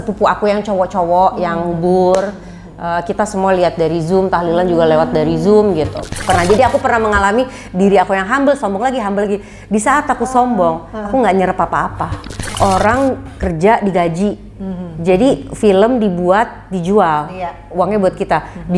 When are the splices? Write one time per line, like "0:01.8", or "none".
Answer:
0:06.1
0:12.3